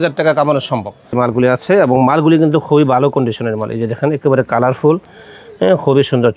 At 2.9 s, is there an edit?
no; 1 cut; at 1.1 s

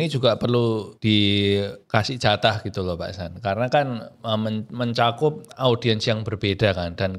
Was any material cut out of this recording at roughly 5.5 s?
no; 2 cuts; at 0.9 s, 1.8 s

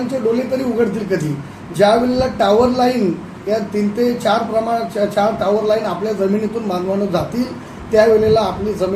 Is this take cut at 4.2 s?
no; 0 cuts

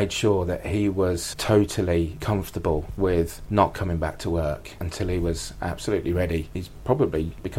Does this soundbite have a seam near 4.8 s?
no; 2 cuts; at 1.3 s, 6.5 s

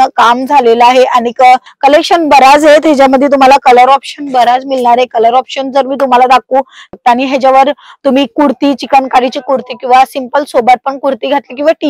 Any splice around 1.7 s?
yes; 2 cuts; at 1.7 s, 6.9 s

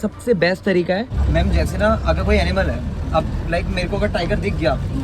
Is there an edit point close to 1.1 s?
yes; 1 cut; at 1.1 s

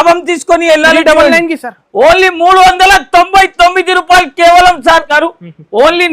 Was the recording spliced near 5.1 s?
yes; 1 cut; at 5.1 s

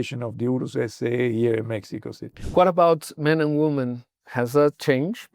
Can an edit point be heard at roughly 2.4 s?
yes; 1 cut; at 2.4 s

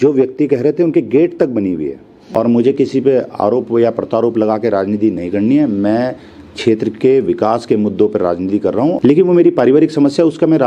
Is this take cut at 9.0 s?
yes; 2 cuts; at 2.1 s, 9.0 s

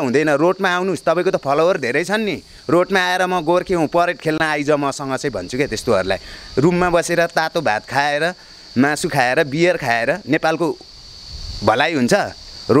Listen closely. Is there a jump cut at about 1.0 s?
no; 0 cuts

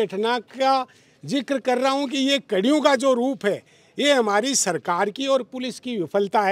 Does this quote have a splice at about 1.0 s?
no; 0 cuts

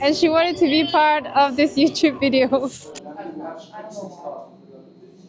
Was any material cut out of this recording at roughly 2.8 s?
yes; 1 cut; at 2.8 s

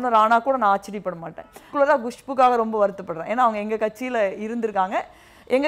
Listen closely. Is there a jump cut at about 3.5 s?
no; 1 cut; at 1.6 s

